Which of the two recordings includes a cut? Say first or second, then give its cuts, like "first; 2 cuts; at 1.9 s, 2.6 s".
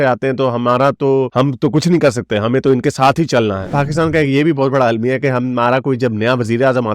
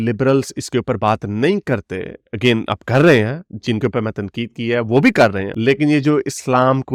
first; 1 cut; at 3.7 s